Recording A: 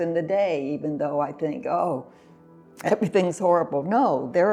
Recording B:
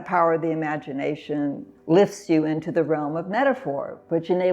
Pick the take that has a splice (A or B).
B